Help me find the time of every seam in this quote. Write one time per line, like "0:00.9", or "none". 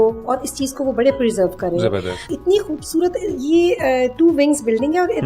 0:02.3